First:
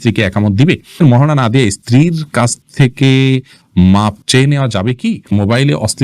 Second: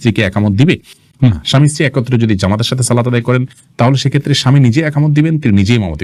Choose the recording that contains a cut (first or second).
first